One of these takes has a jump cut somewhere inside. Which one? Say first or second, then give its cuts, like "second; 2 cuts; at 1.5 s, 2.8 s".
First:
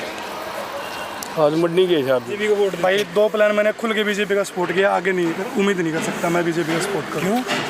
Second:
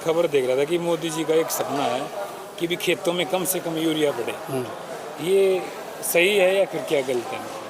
first; 1 cut; at 2.3 s